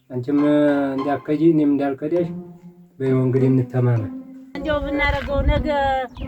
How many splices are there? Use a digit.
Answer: 1